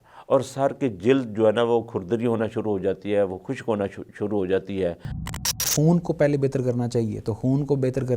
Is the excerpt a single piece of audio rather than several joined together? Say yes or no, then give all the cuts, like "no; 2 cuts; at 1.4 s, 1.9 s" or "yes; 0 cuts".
no; 1 cut; at 5.5 s